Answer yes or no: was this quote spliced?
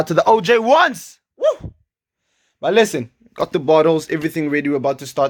no